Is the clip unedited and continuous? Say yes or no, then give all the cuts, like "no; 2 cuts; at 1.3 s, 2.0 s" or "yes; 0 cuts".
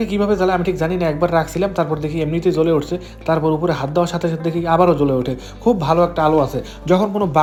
yes; 0 cuts